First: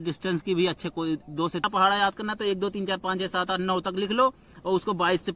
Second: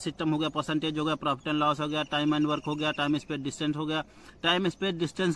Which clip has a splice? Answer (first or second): first